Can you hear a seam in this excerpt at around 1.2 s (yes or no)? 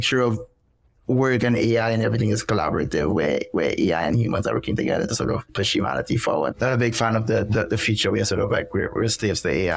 no